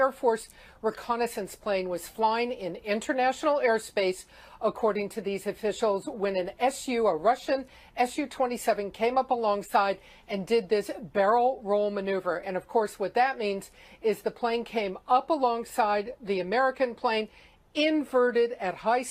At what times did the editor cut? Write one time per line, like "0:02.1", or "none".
0:07.4